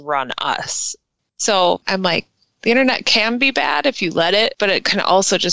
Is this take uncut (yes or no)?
no